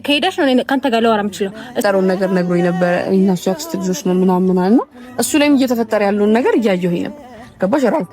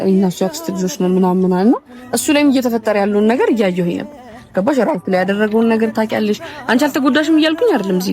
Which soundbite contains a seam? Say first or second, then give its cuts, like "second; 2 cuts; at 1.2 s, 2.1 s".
first; 1 cut; at 1.8 s